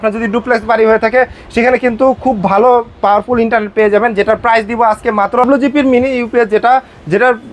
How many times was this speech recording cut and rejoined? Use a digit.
1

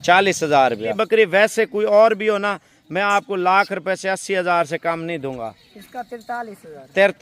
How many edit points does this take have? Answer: 1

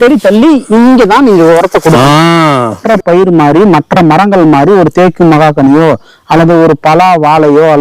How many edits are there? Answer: 1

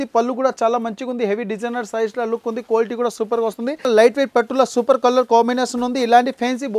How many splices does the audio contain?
1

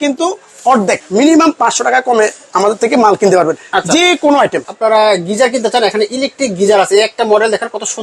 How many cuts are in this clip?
2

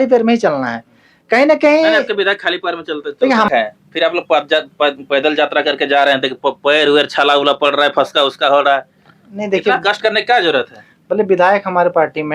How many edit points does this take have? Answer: 1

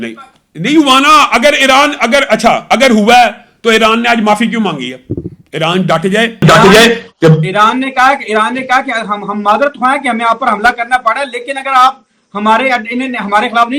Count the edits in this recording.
0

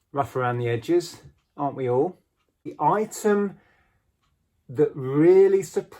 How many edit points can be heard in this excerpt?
1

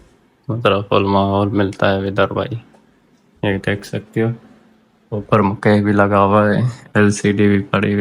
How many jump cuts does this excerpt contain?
0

